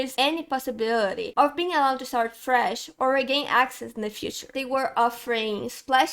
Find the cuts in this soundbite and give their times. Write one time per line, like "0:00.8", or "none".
0:04.5